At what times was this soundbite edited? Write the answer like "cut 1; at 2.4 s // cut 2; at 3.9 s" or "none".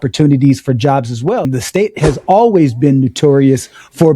cut 1; at 1.4 s